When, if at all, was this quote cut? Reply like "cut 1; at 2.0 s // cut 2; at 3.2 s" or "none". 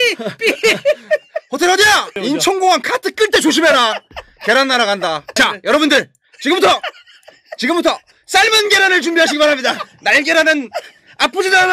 none